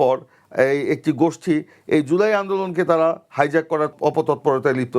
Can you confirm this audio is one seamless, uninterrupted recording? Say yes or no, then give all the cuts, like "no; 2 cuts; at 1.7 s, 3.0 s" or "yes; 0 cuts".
no; 1 cut; at 3.9 s